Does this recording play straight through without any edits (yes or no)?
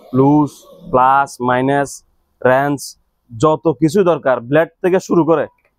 yes